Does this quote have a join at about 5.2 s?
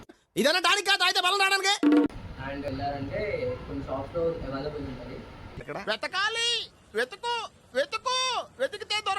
no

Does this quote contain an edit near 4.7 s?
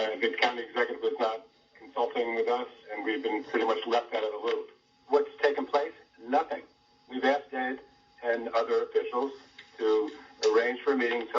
yes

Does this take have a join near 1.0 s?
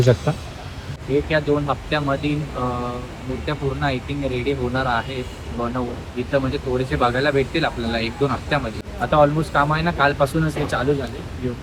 yes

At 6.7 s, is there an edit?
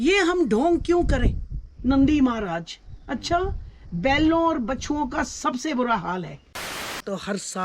yes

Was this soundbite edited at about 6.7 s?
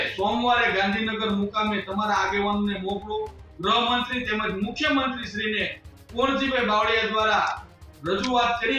no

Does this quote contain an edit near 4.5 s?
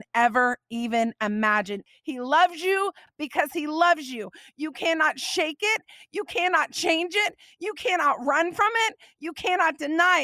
no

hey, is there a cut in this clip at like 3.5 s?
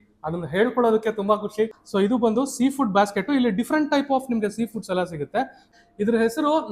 no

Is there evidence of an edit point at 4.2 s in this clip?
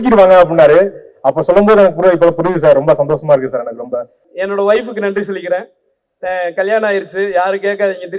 yes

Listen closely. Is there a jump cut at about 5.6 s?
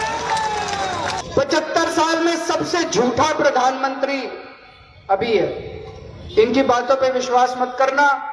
no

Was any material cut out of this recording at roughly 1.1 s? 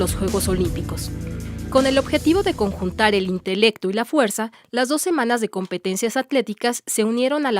no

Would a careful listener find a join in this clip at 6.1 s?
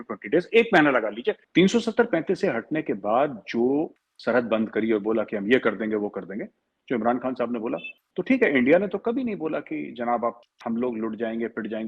no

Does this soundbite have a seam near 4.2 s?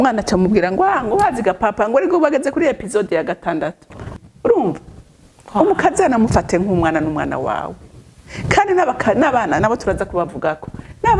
yes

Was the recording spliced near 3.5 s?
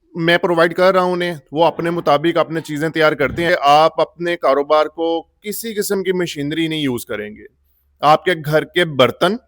yes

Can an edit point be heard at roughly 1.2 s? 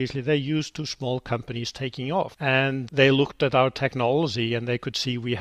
no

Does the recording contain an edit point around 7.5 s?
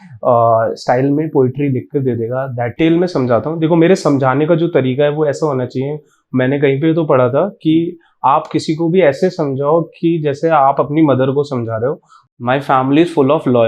no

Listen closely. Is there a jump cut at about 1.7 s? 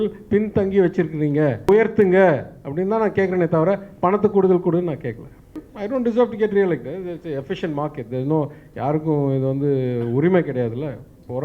yes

